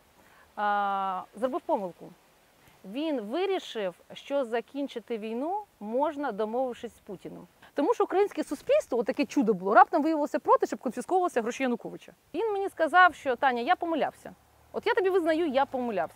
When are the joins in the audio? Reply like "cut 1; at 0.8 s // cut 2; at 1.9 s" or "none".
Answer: cut 1; at 7.6 s // cut 2; at 12.2 s